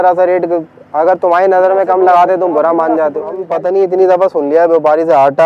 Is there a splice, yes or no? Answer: yes